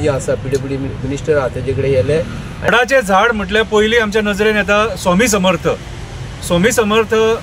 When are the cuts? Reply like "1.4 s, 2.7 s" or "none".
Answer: 2.7 s